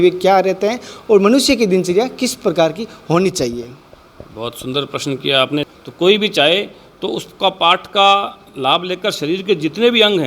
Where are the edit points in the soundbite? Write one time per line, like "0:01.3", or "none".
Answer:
0:05.7